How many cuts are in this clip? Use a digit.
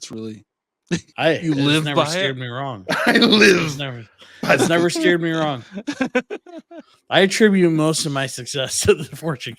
1